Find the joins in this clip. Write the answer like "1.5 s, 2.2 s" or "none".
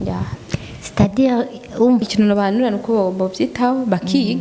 2.0 s